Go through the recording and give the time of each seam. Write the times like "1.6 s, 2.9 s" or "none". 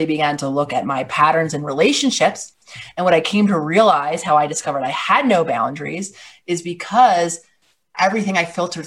7.9 s